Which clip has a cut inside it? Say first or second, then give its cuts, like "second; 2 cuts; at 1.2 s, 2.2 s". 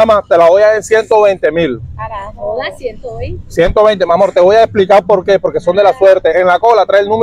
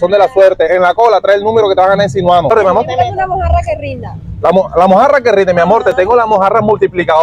second; 1 cut; at 2.5 s